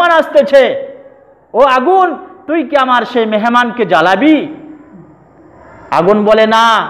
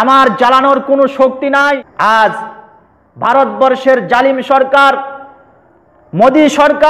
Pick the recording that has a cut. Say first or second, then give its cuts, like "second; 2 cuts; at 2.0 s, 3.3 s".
second; 1 cut; at 1.9 s